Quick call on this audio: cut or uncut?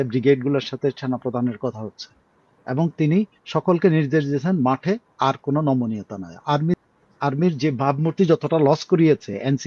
cut